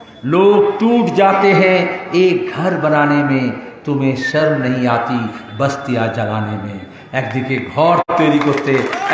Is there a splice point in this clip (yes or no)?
yes